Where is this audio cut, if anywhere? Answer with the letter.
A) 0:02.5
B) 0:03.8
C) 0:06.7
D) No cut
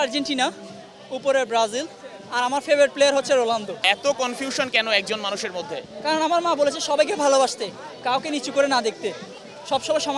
B